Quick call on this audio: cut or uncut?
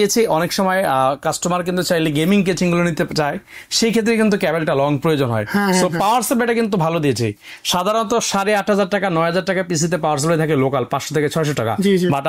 uncut